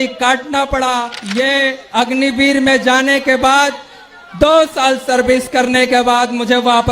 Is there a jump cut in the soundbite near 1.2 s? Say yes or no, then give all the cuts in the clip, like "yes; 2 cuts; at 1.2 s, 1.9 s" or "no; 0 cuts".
yes; 1 cut; at 1.2 s